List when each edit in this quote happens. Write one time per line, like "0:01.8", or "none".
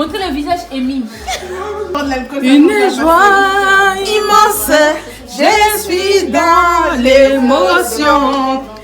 0:02.0